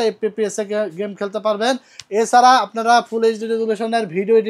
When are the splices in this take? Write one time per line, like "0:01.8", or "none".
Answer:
none